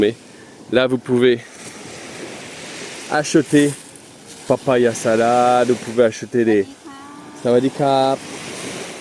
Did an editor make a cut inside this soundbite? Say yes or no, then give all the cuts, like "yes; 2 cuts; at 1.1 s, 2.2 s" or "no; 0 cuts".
no; 0 cuts